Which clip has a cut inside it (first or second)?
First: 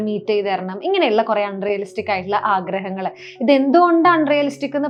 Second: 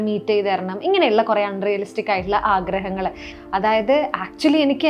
second